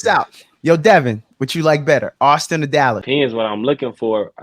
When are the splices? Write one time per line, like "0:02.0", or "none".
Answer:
0:03.0